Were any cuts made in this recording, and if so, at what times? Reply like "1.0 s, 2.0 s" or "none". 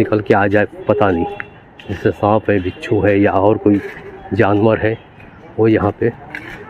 none